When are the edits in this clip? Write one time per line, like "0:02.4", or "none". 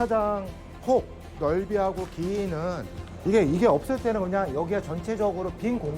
0:03.0

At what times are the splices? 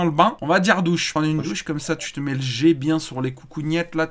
0:01.1

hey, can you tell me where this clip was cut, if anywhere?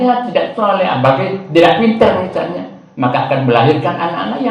none

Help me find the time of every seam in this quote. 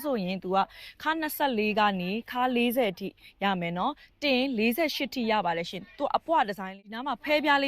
0:06.6

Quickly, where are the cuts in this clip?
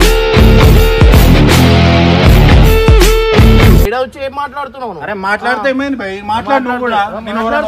0:03.9

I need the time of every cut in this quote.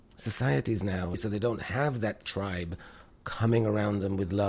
0:01.2

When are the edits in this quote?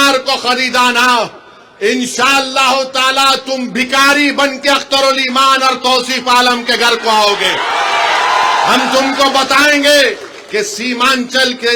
none

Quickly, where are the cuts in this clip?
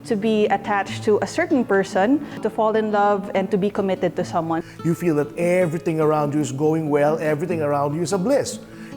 0:02.4
0:04.6

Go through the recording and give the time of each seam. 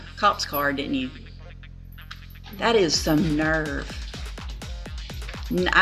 none

